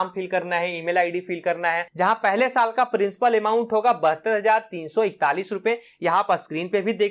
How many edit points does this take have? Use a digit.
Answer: 1